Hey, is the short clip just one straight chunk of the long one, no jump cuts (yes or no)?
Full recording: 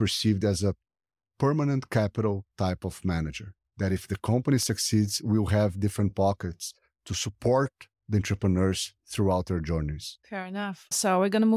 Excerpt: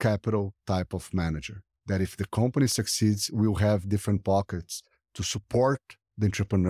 yes